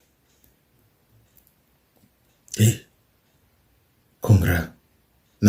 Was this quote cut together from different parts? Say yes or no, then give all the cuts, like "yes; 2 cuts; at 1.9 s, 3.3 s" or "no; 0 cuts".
no; 0 cuts